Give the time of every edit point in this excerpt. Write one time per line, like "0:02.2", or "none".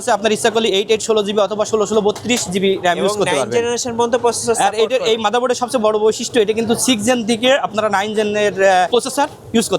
0:08.9